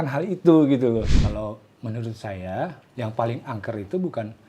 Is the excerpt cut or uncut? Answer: cut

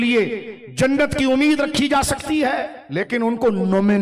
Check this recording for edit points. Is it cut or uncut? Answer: cut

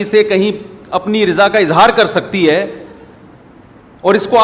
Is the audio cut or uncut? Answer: uncut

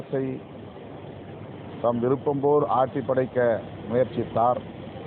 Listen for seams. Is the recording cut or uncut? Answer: uncut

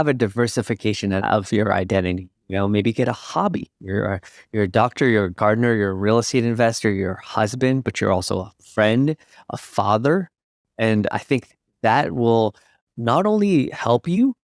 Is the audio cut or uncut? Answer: cut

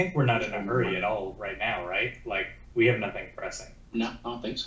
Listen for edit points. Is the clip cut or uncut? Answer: cut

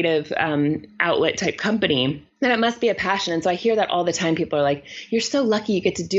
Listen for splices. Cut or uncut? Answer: cut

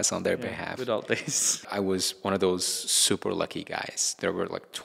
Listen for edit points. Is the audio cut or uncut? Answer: cut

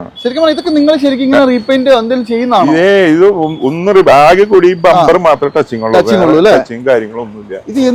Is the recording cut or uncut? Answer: uncut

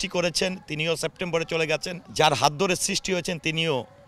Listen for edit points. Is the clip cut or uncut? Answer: cut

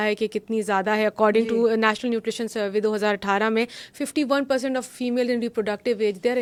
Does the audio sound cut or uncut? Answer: uncut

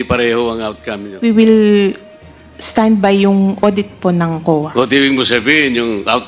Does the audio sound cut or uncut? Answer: cut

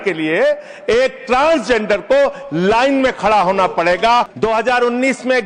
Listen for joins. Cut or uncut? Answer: cut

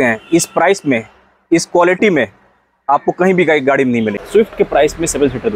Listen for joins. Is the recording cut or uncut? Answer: cut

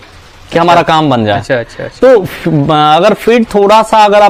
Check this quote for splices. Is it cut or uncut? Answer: uncut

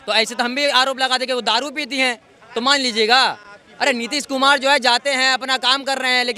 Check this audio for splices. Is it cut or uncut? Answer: uncut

